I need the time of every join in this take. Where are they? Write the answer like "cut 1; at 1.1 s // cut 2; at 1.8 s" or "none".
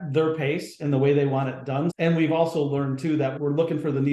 cut 1; at 1.9 s // cut 2; at 3.3 s